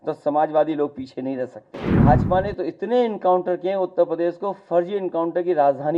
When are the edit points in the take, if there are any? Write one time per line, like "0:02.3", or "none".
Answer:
0:02.0